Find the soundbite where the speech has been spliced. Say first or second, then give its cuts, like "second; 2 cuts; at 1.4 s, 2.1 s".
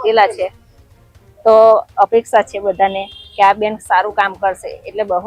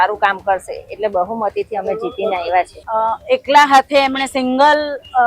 second; 1 cut; at 2.8 s